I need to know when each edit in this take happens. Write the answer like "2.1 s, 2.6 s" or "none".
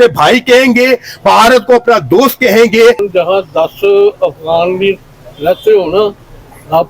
3.0 s